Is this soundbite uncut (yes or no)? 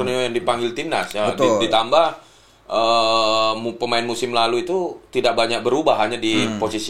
yes